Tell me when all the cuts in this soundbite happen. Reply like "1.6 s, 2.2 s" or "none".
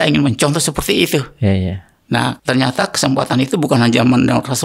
2.4 s